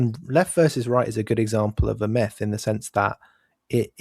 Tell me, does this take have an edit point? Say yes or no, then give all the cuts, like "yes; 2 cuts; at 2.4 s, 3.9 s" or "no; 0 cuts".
no; 0 cuts